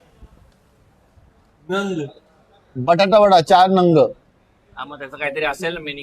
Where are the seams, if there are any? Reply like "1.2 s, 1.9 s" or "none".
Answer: none